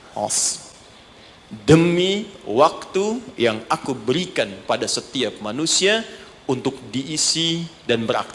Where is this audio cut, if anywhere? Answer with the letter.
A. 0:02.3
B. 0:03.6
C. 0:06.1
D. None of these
D